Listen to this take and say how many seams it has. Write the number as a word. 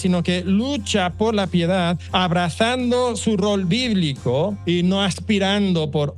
two